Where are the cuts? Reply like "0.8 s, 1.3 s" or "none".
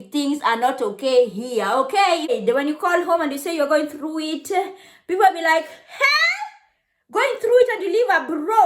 2.4 s